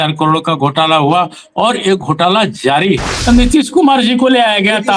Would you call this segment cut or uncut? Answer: cut